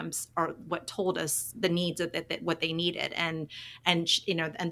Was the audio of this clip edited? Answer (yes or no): no